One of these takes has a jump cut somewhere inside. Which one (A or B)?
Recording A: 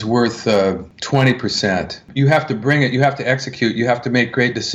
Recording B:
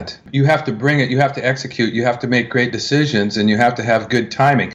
A